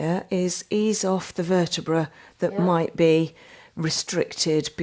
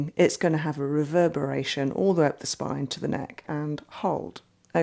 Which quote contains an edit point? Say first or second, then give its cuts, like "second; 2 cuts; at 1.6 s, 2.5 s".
second; 1 cut; at 3.5 s